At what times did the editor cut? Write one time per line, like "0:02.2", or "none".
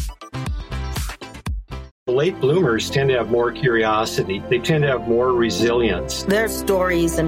0:01.9